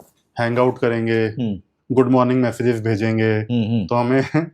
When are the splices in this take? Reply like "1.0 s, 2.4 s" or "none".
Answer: 1.8 s